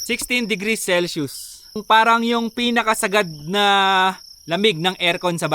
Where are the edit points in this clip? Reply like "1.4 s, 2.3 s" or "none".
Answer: 1.8 s

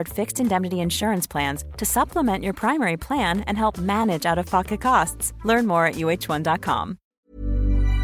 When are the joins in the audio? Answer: 7.1 s

